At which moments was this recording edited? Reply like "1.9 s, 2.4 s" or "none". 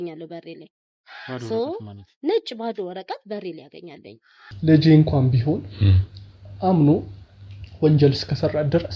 4.5 s